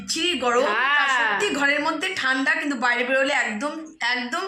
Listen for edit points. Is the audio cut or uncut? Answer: uncut